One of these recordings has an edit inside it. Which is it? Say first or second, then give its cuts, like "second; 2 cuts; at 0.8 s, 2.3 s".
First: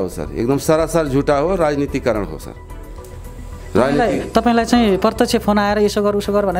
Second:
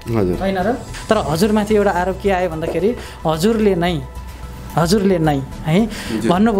second; 1 cut; at 0.9 s